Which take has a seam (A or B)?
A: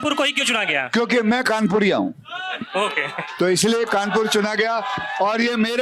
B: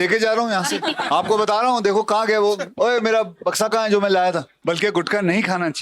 B